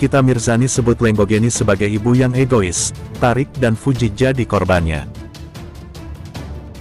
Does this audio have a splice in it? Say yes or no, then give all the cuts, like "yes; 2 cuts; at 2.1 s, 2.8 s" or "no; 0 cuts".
yes; 1 cut; at 5.0 s